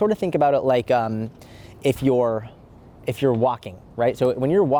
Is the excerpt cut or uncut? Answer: uncut